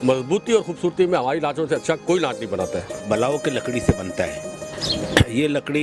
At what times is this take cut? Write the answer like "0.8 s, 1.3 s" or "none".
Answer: 3.0 s